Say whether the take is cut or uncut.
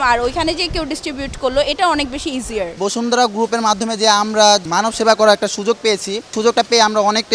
cut